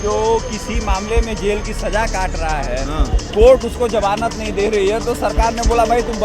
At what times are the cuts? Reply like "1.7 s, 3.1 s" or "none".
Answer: none